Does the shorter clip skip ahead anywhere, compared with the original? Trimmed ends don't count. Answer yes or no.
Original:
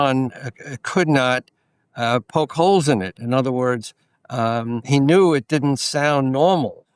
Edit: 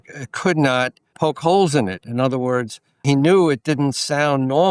yes